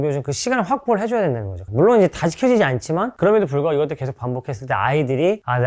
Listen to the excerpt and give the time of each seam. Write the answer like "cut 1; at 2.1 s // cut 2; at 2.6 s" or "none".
cut 1; at 1.5 s